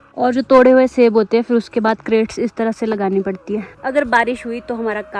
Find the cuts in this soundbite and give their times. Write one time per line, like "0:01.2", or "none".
0:03.7